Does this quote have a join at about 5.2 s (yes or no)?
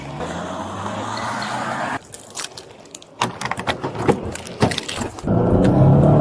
yes